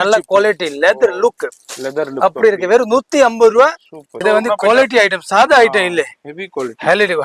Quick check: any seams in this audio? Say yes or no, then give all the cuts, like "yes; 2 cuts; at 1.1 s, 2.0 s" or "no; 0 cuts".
yes; 1 cut; at 4.2 s